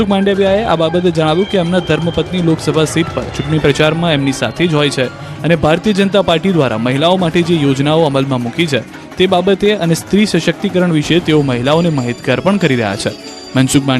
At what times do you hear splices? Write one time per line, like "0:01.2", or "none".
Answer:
none